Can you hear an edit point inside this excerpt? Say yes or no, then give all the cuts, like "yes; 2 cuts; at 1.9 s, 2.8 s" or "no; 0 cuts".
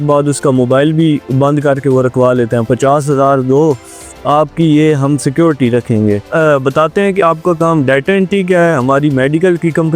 yes; 2 cuts; at 2.7 s, 6.2 s